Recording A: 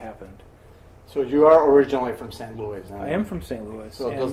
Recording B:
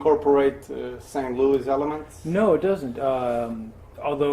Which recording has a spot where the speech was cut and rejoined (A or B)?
B